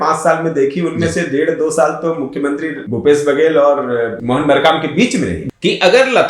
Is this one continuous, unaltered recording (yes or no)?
no